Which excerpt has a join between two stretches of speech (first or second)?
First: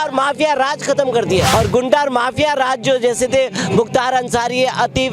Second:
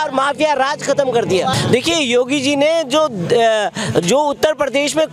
first